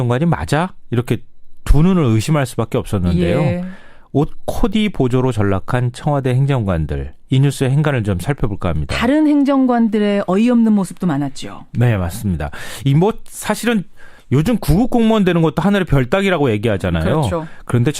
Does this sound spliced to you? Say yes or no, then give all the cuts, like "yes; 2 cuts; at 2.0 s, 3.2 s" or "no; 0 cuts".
yes; 1 cut; at 13.3 s